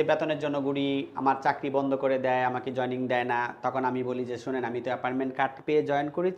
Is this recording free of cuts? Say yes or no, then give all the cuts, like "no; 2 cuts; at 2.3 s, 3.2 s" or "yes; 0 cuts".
yes; 0 cuts